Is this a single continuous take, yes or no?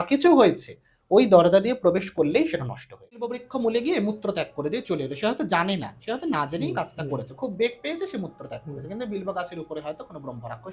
no